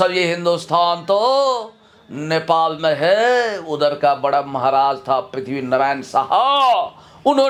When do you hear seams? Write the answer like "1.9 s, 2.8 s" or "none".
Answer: none